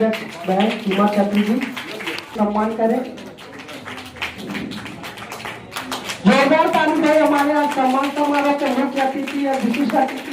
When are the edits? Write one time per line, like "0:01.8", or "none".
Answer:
0:02.3